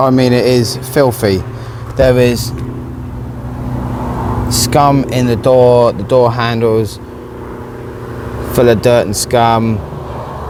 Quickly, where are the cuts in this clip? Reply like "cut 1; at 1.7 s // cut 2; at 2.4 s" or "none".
none